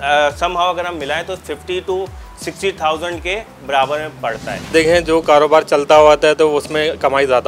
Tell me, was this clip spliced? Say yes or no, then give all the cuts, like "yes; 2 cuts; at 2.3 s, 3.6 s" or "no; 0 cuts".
yes; 1 cut; at 4.7 s